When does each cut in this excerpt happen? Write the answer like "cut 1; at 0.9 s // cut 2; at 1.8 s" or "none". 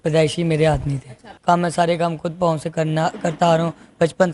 cut 1; at 1.3 s